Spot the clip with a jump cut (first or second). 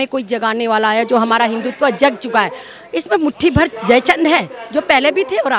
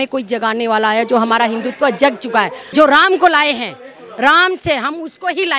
second